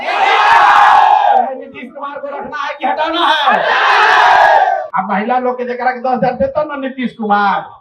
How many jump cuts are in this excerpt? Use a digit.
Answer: 1